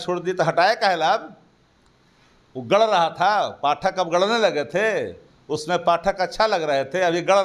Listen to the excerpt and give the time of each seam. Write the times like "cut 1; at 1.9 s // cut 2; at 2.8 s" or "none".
none